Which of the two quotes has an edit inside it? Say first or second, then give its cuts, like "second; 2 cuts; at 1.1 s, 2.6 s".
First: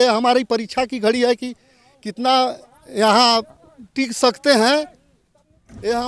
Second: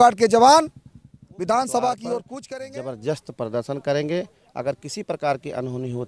second; 1 cut; at 2.3 s